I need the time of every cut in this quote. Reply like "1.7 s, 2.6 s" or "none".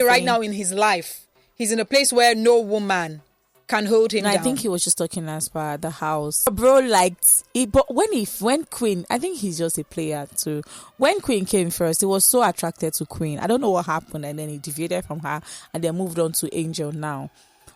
6.5 s